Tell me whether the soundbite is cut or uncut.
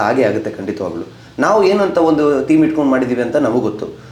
uncut